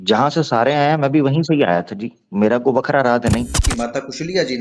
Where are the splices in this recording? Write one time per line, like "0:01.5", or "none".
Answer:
0:03.7